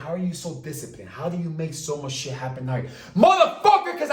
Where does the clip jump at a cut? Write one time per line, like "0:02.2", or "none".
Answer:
none